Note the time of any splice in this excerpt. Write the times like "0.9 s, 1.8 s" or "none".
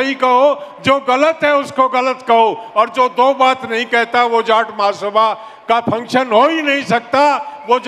none